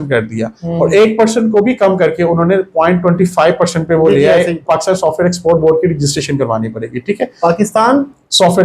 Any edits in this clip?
yes; 1 cut; at 4.6 s

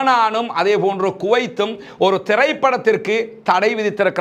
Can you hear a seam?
no; 0 cuts

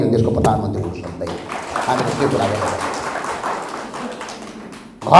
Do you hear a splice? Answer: no; 0 cuts

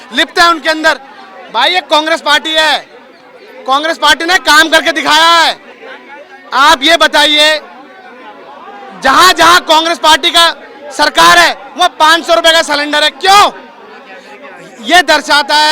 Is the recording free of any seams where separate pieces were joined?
yes; 0 cuts

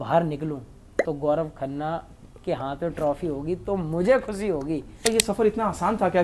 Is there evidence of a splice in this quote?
yes; 1 cut; at 5.0 s

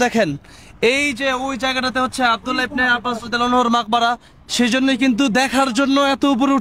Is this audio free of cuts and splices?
yes; 0 cuts

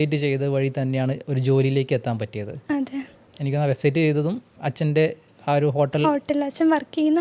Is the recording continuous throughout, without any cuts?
no; 2 cuts; at 3.2 s, 4.5 s

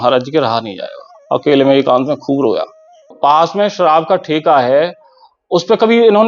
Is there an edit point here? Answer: yes; 1 cut; at 3.0 s

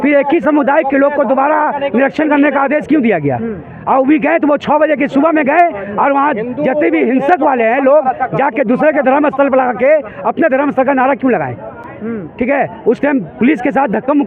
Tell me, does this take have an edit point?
no; 0 cuts

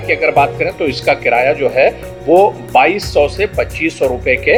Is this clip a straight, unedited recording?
yes; 0 cuts

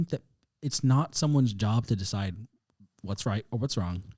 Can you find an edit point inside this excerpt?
no; 0 cuts

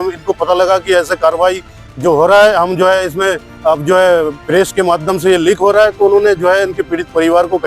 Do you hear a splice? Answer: no; 0 cuts

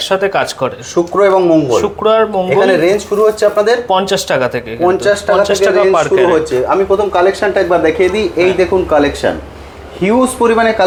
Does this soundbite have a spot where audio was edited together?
no; 0 cuts

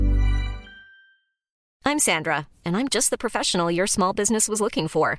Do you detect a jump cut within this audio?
yes; 1 cut; at 1.6 s

